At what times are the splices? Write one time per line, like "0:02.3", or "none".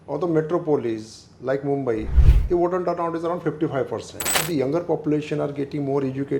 0:04.4

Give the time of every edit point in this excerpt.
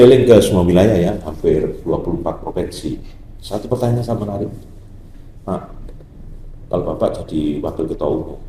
none

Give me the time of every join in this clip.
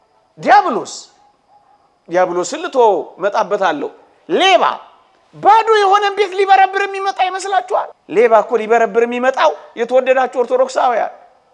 0:08.0

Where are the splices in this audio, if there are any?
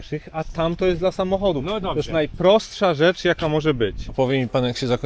0:04.0

